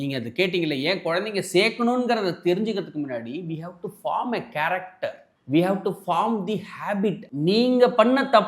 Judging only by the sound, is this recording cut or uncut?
cut